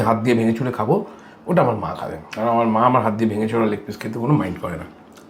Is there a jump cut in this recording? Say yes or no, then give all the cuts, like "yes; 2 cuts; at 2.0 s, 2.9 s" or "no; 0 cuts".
no; 0 cuts